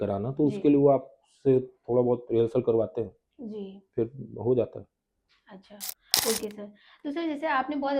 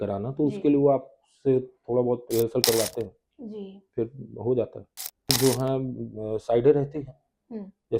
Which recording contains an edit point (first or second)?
second